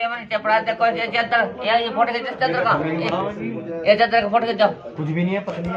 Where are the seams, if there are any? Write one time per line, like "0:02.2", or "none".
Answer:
none